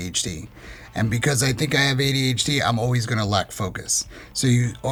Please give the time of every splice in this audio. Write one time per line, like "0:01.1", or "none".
none